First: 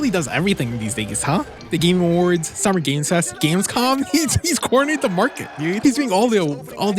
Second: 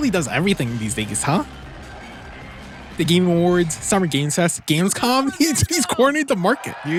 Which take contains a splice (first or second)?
first